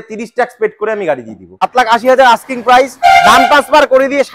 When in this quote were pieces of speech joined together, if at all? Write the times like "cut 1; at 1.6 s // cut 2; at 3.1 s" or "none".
cut 1; at 1.6 s